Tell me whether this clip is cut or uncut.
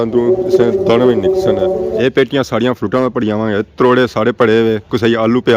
cut